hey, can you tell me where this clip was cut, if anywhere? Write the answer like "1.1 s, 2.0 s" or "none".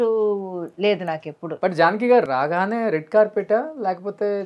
1.4 s

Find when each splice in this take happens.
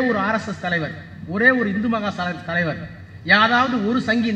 none

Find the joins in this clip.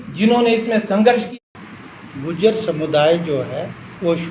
1.3 s

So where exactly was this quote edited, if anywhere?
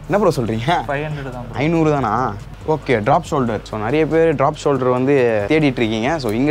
2.4 s, 3.7 s, 5.4 s

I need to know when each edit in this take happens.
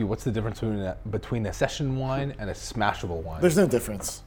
1.5 s

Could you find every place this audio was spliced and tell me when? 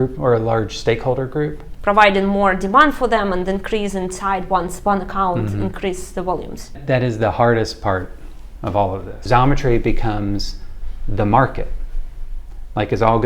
1.7 s, 6.8 s, 9.2 s

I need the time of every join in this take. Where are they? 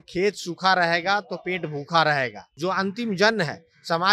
2.4 s

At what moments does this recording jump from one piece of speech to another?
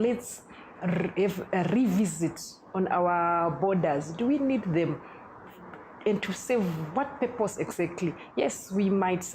none

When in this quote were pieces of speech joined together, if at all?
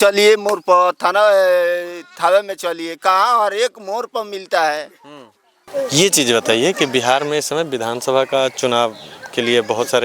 5.6 s

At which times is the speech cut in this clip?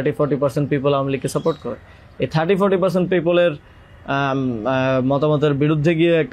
none

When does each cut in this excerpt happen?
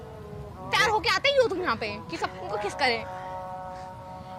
none

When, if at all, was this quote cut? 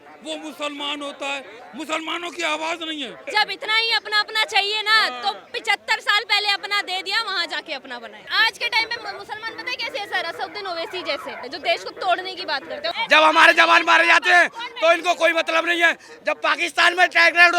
1.6 s, 3.3 s, 8.2 s, 11.4 s, 12.9 s

